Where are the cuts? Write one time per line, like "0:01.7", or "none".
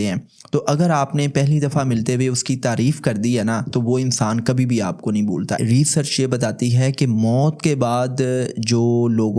0:05.6